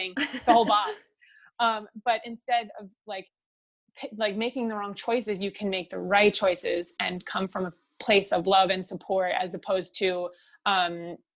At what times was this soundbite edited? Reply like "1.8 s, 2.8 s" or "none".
none